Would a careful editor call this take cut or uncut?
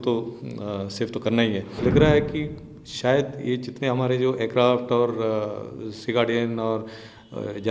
cut